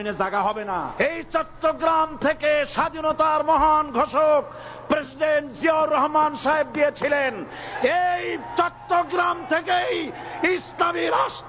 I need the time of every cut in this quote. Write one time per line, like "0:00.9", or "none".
0:00.9